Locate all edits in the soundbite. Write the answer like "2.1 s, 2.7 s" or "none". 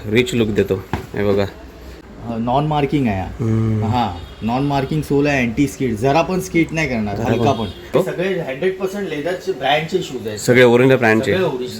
2.1 s, 7.9 s